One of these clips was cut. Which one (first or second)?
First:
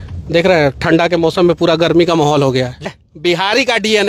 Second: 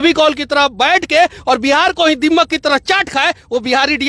first